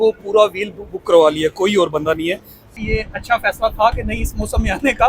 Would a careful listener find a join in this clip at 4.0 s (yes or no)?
no